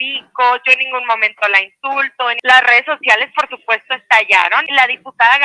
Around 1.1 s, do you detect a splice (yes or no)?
no